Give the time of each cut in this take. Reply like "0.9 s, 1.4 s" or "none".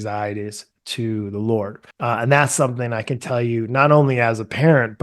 1.8 s